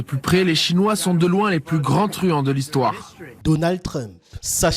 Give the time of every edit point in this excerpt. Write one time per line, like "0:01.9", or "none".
0:03.4